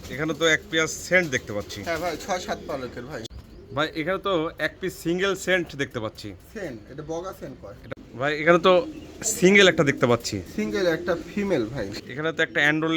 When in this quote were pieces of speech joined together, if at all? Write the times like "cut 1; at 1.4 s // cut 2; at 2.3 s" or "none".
cut 1; at 3.2 s // cut 2; at 7.9 s // cut 3; at 11.9 s